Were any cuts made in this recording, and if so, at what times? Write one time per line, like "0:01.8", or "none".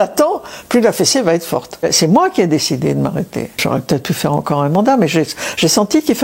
0:01.8
0:03.6